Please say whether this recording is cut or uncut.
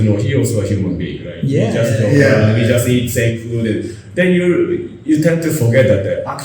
uncut